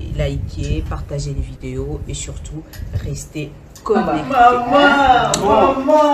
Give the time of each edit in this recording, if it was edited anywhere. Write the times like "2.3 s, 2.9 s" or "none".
4.3 s